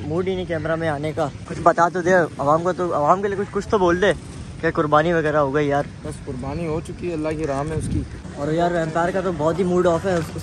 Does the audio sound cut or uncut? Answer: uncut